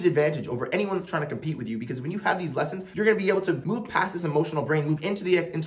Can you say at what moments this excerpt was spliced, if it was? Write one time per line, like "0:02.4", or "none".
0:03.6